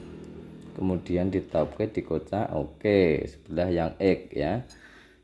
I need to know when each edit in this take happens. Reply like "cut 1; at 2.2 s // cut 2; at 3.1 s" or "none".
none